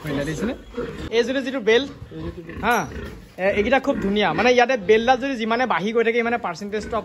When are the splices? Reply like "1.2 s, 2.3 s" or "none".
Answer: 1.1 s